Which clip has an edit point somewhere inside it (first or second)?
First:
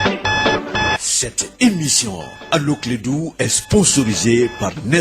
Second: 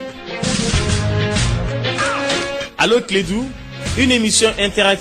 first